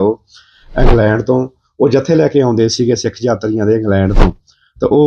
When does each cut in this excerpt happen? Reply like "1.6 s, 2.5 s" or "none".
none